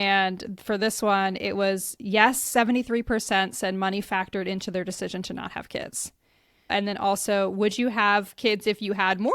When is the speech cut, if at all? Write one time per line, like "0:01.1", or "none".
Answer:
0:06.7